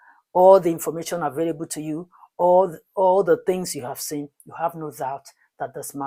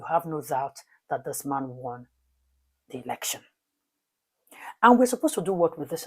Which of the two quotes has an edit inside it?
second; 1 cut; at 3.9 s

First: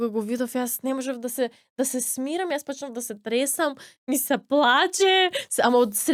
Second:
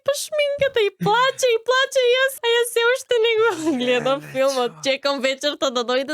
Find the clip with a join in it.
second; 1 cut; at 2.4 s

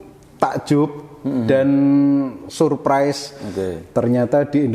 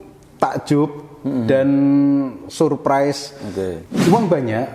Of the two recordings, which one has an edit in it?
second; 1 cut; at 3.8 s

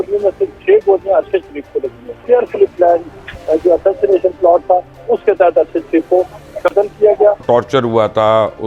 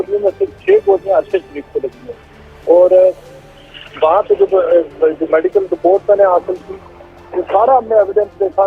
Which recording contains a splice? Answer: first; 2 cuts; at 2.1 s, 7.4 s

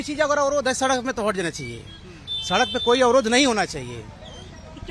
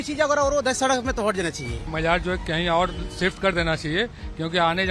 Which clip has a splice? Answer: second; 1 cut; at 1.9 s

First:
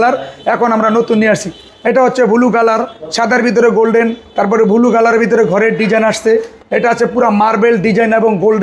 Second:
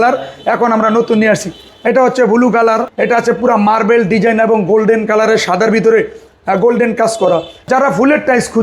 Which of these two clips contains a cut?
second; 2 cuts; at 2.9 s, 7.5 s

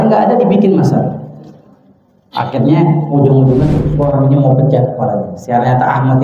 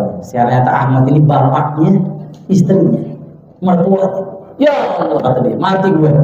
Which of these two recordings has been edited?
first; 1 cut; at 3.8 s

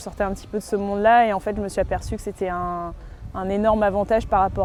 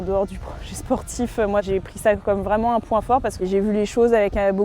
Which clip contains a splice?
second; 2 cuts; at 1.6 s, 3.4 s

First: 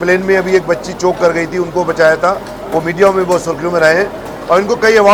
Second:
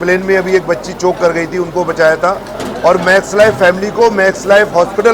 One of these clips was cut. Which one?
second; 1 cut; at 2.5 s

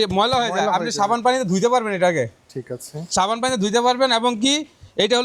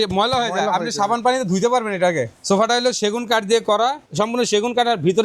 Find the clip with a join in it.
second; 2 cuts; at 2.3 s, 4.0 s

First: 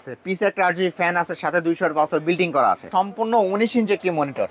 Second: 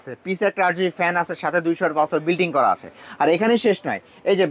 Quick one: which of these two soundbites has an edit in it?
first; 1 cut; at 2.9 s

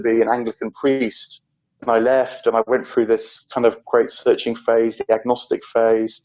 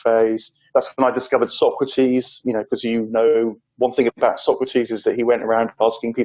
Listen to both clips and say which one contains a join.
first; 1 cut; at 1.8 s

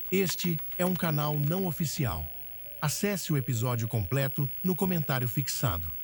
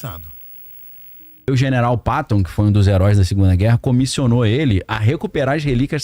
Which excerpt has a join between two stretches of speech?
second; 1 cut; at 1.5 s

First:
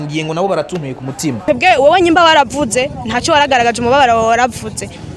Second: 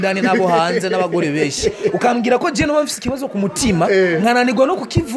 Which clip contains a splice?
first; 1 cut; at 1.4 s

